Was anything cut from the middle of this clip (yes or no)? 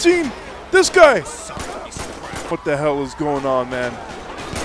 yes